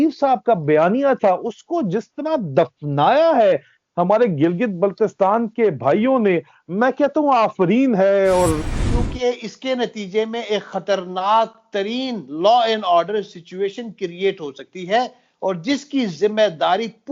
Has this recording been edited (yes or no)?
yes